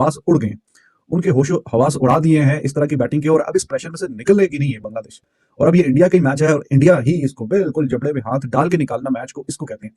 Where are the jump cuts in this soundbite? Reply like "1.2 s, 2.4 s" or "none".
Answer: none